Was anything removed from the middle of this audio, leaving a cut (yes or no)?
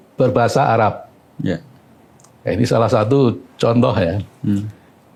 no